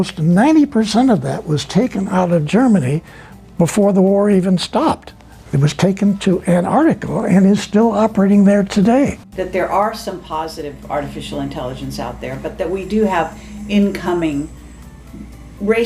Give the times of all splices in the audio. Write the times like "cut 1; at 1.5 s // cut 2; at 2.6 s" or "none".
cut 1; at 9.2 s